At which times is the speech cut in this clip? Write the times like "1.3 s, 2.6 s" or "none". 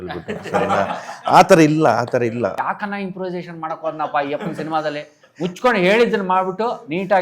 2.5 s